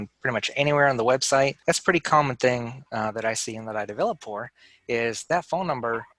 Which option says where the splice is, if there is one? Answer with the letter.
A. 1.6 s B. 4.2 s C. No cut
A